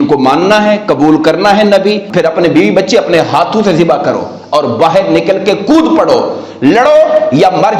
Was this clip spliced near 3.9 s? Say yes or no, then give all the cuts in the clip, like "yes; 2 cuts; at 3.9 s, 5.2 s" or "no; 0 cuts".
no; 1 cut; at 2.1 s